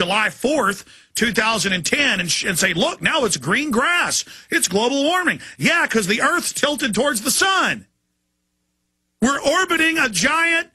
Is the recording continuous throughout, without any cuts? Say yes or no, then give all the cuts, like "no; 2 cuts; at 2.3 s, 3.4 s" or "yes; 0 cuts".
no; 1 cut; at 6.4 s